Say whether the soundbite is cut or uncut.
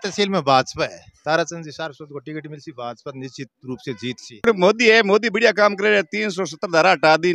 cut